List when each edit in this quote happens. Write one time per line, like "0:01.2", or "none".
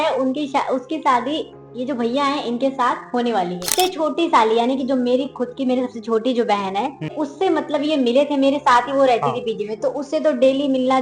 0:03.7
0:07.1